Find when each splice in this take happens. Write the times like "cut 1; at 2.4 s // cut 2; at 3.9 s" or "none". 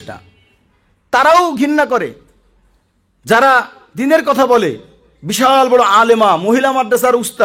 cut 1; at 0.9 s